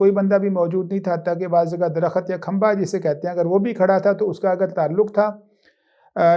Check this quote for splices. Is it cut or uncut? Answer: uncut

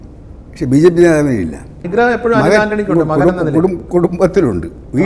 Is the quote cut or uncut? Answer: cut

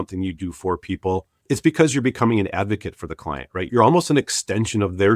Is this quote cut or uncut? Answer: cut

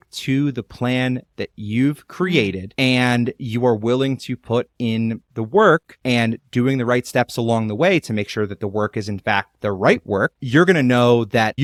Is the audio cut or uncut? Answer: uncut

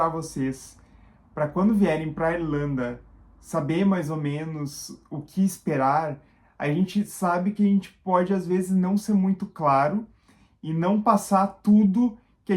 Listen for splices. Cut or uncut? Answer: uncut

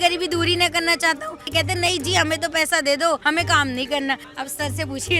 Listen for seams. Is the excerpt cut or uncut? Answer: cut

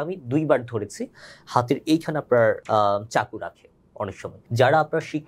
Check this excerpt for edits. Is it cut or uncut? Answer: cut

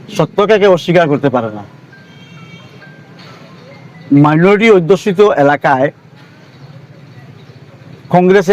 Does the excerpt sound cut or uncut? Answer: uncut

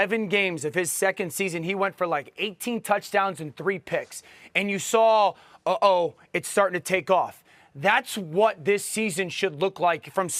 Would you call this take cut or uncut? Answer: uncut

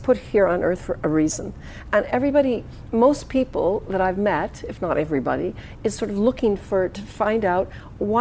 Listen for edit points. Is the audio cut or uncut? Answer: uncut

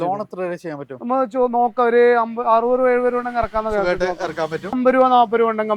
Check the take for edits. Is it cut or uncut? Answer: cut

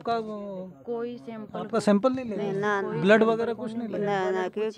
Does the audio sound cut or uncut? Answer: uncut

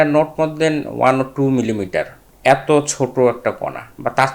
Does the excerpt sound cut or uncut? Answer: cut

